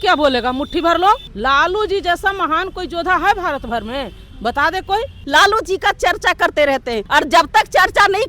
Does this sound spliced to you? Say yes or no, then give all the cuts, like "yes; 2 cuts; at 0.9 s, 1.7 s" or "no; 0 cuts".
yes; 3 cuts; at 1.3 s, 5.2 s, 7.0 s